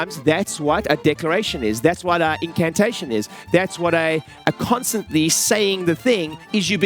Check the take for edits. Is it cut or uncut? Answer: uncut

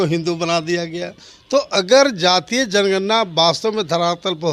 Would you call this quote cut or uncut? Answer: uncut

